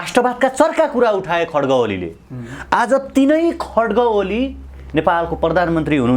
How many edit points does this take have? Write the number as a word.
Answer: zero